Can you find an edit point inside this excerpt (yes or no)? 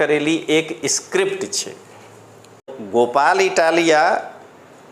yes